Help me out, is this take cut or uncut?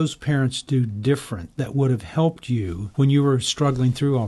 cut